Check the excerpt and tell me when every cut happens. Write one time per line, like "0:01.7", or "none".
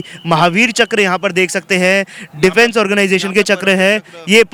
none